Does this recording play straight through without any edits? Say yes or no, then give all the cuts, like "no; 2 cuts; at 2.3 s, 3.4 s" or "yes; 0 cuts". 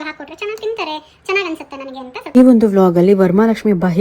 no; 1 cut; at 2.4 s